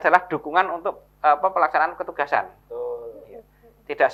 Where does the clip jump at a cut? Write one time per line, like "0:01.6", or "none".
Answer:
none